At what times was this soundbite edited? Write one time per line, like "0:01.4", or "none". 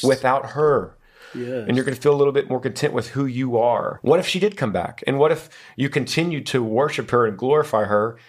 0:03.9

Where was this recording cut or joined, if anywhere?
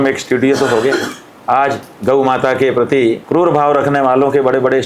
0:01.9
0:03.2

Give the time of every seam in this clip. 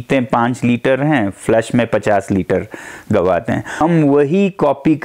0:03.7

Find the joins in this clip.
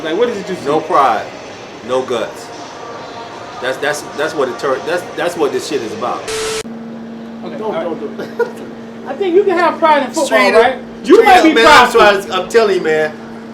0:06.4

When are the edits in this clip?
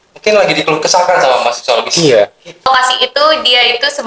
0:02.7

